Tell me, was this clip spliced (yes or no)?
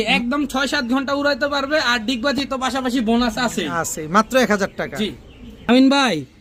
no